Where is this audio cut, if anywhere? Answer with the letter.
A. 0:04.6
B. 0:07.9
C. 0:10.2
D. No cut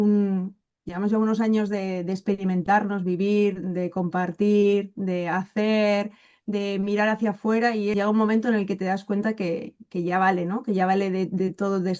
B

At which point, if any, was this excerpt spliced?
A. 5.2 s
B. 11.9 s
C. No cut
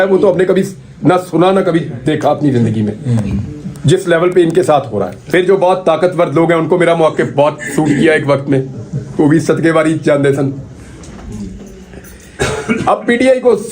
A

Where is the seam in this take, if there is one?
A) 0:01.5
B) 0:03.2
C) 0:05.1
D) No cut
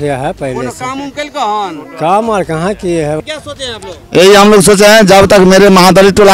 B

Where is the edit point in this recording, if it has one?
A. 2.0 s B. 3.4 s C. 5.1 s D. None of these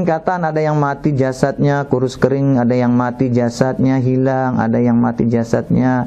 D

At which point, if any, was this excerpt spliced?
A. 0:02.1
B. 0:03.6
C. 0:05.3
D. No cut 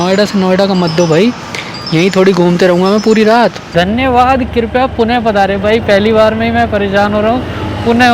B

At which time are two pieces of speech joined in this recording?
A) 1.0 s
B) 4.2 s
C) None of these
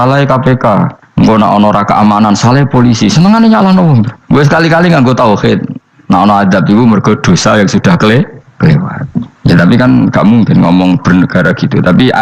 A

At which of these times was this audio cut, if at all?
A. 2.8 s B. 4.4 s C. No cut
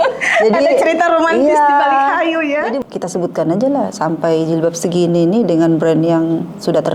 A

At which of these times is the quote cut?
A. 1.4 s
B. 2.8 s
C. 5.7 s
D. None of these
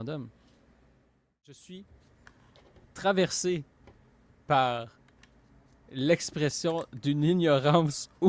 A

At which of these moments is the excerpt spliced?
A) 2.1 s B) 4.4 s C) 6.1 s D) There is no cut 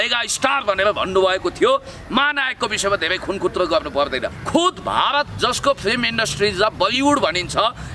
B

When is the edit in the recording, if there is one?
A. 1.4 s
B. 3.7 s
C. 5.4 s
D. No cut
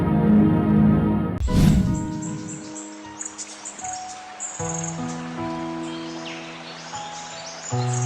A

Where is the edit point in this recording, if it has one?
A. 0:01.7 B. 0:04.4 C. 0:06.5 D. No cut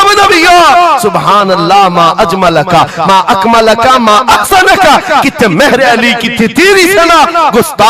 D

